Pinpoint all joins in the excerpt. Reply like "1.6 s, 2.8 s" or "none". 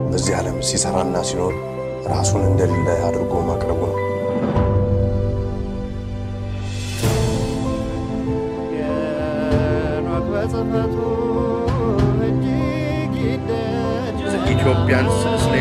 none

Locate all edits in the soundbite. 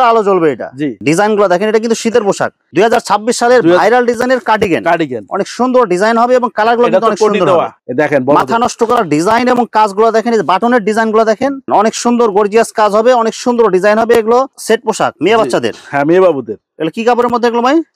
1.0 s, 2.6 s, 7.8 s, 11.6 s, 14.5 s

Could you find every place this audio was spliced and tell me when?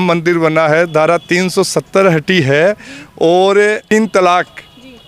3.9 s

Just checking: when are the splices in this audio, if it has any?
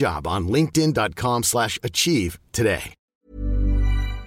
3.0 s

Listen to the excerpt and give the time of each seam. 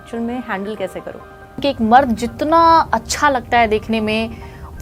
1.6 s

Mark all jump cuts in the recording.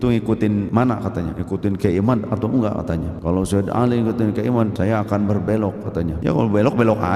0.9 s, 3.1 s, 4.7 s, 6.1 s

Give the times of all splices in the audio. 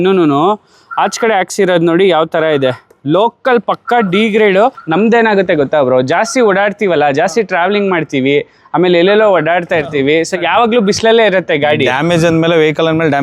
none

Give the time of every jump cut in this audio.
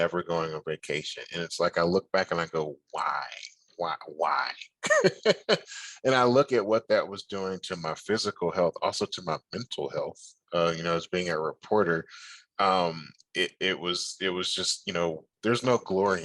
15.3 s

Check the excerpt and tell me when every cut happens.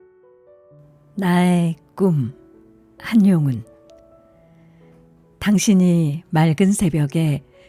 1.1 s

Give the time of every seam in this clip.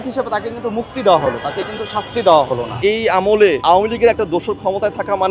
2.7 s, 3.6 s

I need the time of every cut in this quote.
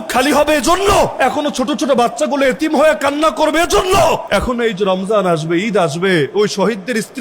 1.1 s, 4.2 s

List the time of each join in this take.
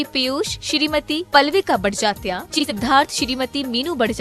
2.6 s

